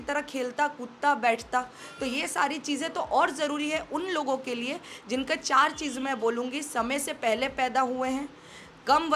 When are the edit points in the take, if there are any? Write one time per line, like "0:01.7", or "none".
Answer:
none